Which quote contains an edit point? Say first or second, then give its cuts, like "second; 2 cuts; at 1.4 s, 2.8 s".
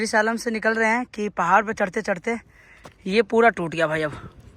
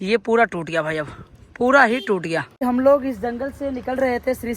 second; 1 cut; at 2.5 s